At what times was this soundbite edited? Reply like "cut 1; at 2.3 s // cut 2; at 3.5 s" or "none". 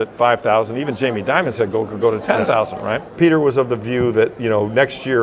cut 1; at 3.0 s